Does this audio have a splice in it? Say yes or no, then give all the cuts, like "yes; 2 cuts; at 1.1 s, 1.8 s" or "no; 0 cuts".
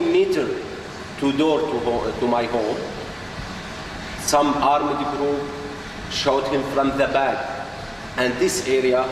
yes; 1 cut; at 7.9 s